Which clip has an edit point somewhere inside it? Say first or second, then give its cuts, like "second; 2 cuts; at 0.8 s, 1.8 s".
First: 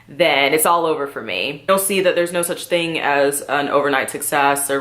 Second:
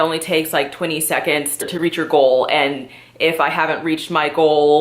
first; 1 cut; at 1.6 s